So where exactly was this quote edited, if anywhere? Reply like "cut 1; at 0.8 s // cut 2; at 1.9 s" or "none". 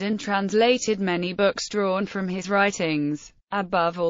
cut 1; at 3.0 s